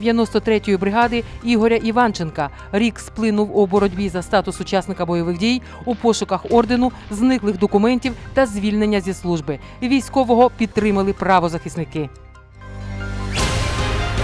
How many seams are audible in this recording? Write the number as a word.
one